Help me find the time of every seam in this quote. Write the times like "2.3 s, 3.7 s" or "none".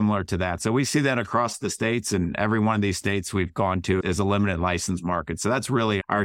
none